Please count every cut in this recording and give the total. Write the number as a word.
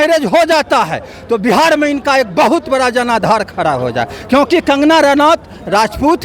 zero